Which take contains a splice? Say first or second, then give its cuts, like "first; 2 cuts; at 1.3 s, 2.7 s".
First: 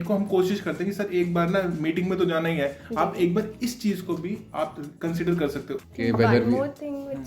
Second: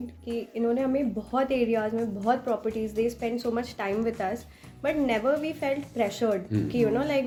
first; 1 cut; at 5.7 s